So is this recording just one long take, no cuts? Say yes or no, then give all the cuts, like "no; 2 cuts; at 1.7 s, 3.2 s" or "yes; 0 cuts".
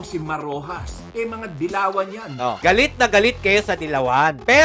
no; 2 cuts; at 1.0 s, 2.6 s